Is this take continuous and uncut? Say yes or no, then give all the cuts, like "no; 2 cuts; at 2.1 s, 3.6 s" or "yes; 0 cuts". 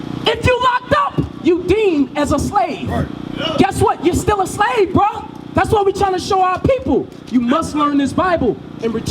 yes; 0 cuts